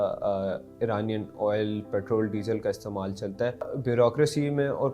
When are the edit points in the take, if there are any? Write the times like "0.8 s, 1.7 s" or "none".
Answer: 3.8 s